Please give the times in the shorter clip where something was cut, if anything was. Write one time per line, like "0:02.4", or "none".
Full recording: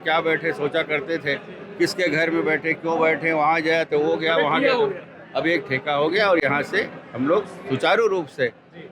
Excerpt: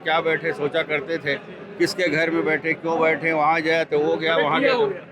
none